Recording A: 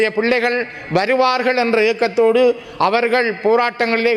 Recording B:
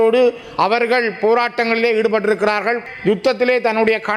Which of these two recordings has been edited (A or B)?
B